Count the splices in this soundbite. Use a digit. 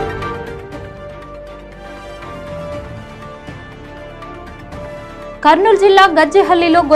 0